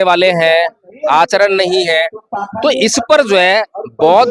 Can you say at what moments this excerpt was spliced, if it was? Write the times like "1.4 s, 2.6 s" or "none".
none